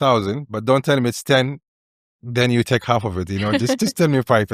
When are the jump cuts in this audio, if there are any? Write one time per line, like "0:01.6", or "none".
none